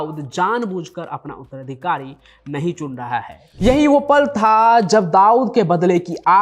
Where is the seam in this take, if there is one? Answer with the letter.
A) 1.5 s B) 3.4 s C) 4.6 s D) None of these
B